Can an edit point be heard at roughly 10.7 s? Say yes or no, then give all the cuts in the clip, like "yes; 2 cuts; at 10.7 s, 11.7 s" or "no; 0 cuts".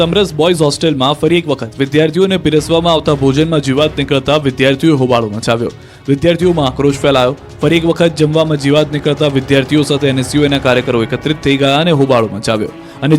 no; 1 cut; at 6.7 s